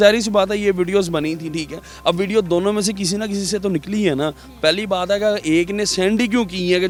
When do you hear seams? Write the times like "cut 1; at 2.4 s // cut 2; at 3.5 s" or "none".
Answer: none